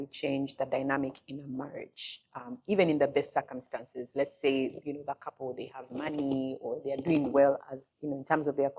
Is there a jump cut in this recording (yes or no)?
no